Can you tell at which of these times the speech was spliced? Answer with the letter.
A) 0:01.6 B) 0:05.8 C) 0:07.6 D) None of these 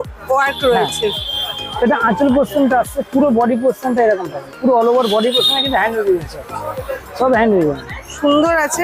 D